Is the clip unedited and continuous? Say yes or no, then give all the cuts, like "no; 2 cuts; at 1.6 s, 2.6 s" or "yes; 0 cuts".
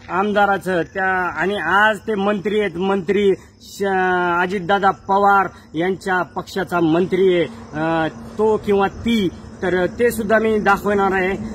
yes; 0 cuts